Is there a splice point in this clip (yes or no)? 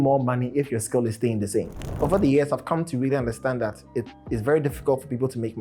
yes